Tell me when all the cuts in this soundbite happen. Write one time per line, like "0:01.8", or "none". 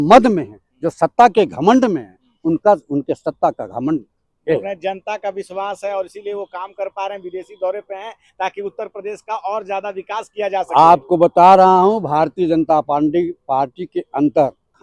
none